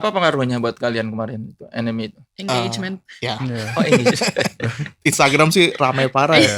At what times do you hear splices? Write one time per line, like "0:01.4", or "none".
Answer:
0:02.3